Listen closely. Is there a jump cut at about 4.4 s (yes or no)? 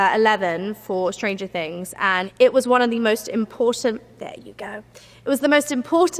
no